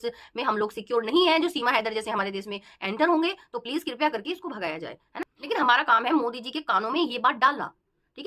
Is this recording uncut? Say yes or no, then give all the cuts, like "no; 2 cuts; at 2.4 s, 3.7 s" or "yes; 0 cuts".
no; 1 cut; at 5.2 s